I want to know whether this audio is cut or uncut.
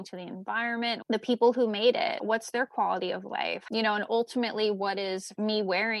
cut